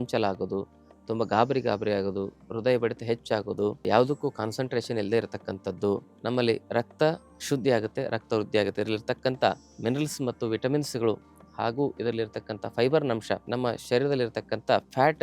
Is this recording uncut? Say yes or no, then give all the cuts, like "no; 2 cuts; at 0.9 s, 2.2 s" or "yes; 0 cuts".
no; 3 cuts; at 6.1 s, 9.7 s, 13.5 s